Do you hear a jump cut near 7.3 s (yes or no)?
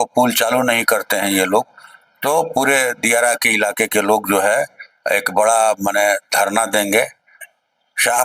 yes